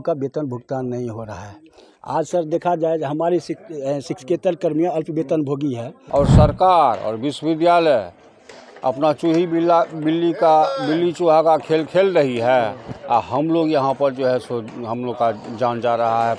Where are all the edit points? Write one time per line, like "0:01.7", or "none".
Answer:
0:05.9